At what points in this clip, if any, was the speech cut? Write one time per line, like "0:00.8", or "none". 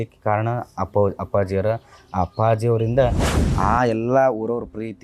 0:03.3